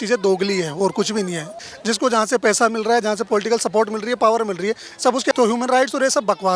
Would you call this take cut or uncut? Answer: cut